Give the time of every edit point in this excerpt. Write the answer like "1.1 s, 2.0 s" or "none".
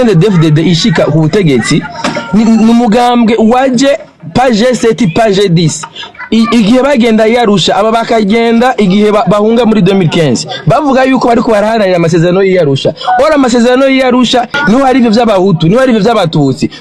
14.5 s